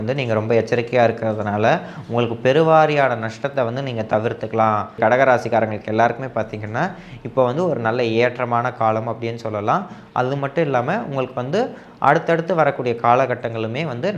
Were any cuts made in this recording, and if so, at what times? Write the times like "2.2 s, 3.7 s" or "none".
5.0 s